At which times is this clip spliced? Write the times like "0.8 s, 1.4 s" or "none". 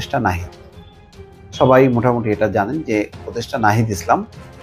none